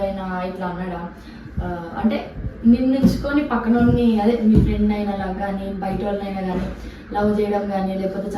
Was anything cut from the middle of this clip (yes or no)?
no